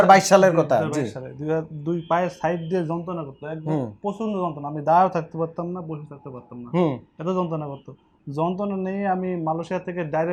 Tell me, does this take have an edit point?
no; 0 cuts

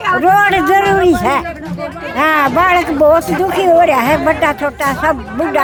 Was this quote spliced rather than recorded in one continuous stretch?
no; 0 cuts

